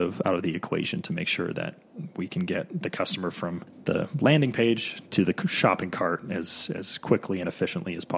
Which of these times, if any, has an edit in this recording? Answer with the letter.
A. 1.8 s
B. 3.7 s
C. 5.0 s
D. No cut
B